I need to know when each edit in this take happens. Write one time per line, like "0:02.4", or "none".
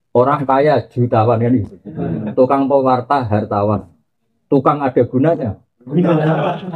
none